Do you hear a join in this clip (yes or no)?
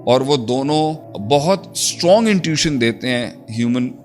yes